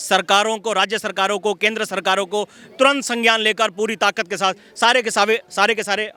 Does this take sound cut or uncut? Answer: uncut